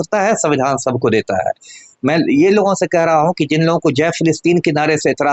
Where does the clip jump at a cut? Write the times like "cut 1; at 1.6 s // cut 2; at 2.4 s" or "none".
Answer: none